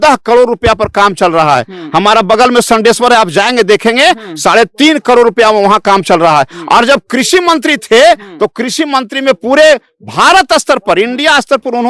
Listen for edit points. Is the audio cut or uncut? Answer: uncut